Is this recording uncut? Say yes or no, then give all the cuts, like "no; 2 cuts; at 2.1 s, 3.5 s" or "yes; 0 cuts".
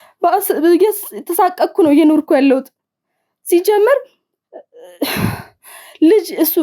yes; 0 cuts